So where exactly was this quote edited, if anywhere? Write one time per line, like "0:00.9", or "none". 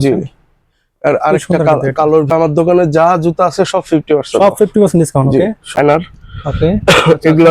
0:02.3
0:05.8